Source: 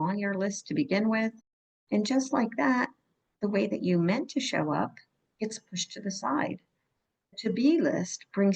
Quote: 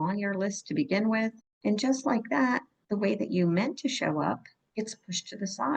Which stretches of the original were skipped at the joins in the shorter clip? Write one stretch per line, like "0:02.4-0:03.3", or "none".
0:01.5-0:01.7
0:03.0-0:03.3
0:05.1-0:05.2